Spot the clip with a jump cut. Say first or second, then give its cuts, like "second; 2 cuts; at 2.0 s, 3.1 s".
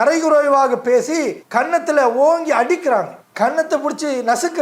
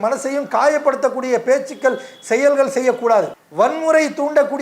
second; 1 cut; at 3.4 s